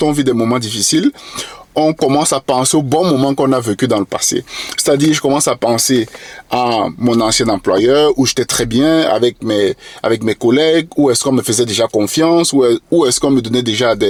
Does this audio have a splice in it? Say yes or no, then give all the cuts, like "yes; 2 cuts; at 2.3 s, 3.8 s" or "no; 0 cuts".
no; 0 cuts